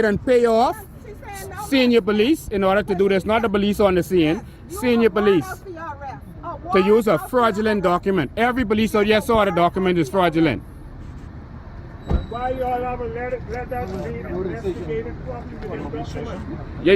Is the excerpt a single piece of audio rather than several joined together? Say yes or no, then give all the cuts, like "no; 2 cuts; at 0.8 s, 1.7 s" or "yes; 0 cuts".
no; 1 cut; at 8.5 s